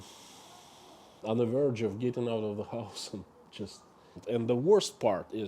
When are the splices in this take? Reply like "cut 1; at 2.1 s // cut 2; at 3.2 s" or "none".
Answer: cut 1; at 4.2 s

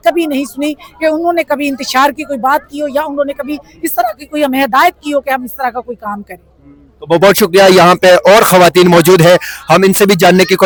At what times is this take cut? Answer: none

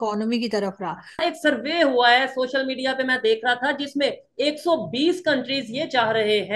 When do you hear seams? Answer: cut 1; at 1.2 s

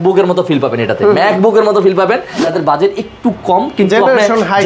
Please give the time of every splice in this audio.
cut 1; at 2.4 s

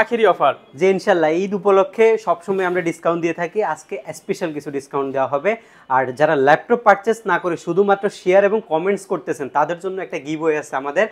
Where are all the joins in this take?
none

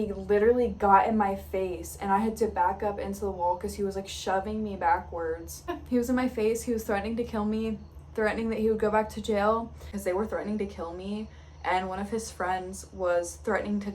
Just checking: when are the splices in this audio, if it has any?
cut 1; at 5.7 s // cut 2; at 9.9 s

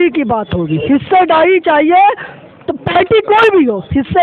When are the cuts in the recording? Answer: none

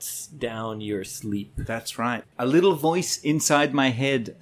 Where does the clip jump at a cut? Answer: cut 1; at 2.3 s

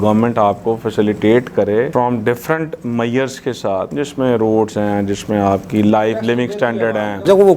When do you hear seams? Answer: none

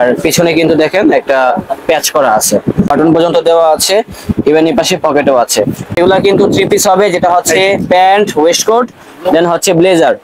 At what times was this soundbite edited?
cut 1; at 2.9 s // cut 2; at 6.0 s

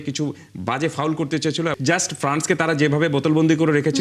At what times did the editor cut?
cut 1; at 1.7 s

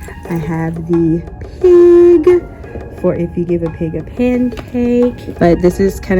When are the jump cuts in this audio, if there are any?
cut 1; at 5.2 s

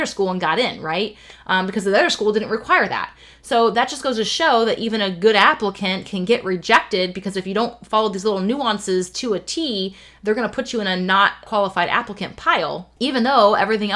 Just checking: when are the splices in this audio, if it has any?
cut 1; at 11.4 s // cut 2; at 12.9 s

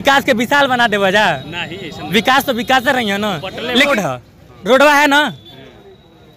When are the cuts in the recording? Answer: cut 1; at 3.9 s

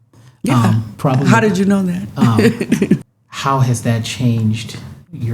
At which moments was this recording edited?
cut 1; at 3.1 s

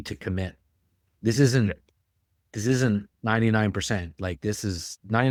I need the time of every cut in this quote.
none

